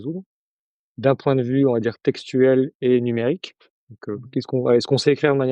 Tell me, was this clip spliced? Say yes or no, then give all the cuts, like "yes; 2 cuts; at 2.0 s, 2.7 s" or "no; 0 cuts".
no; 0 cuts